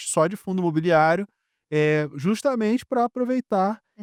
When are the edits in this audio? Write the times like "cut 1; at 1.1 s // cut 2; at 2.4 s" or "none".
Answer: none